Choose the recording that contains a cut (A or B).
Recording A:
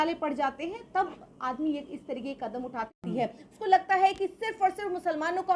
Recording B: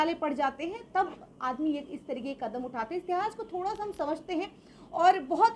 A